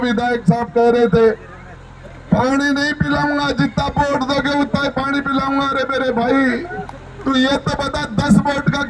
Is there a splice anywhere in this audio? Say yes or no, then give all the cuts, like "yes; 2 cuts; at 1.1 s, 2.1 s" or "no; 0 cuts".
no; 0 cuts